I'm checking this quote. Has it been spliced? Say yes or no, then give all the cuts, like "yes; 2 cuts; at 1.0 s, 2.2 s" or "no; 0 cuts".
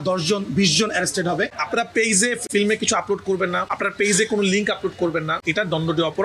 yes; 1 cut; at 1.5 s